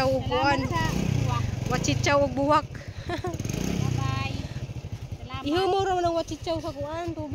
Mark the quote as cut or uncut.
uncut